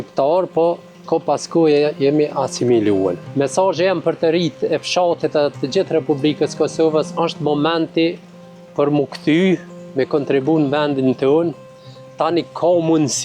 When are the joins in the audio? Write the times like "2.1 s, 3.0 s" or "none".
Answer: 3.2 s